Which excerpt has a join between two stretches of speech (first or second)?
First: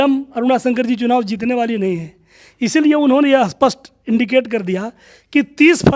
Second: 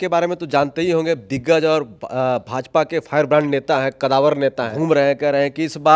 second